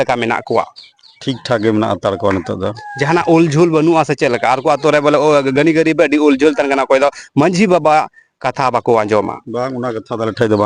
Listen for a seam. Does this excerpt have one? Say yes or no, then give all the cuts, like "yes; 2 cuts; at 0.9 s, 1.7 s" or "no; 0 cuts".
no; 0 cuts